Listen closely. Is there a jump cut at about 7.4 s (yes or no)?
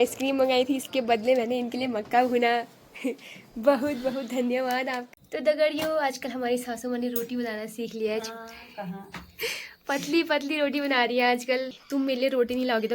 no